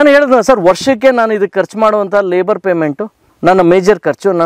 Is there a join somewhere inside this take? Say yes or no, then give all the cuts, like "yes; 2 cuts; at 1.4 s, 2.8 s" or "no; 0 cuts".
no; 0 cuts